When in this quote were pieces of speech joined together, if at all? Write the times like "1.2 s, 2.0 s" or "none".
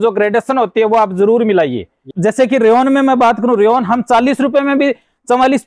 2.1 s